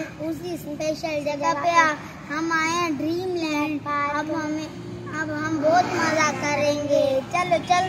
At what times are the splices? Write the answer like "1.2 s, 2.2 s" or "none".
none